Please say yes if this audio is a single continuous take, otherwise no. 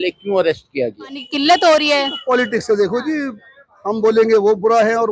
no